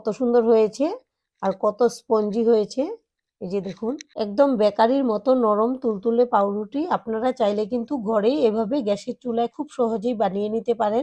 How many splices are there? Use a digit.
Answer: 1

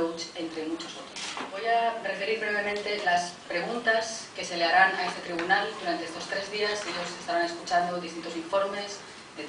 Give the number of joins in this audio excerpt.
1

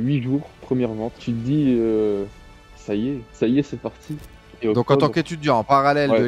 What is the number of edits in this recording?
3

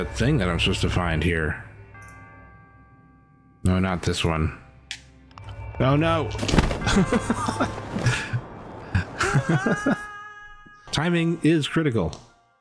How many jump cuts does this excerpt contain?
1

